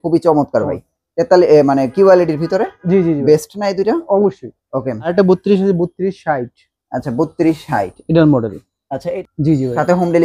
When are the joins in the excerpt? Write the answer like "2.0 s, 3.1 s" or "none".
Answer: 5.1 s, 9.1 s